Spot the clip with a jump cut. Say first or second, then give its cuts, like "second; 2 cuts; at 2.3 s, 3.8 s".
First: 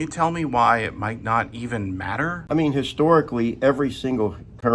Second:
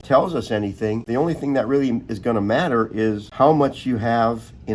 first; 1 cut; at 2.4 s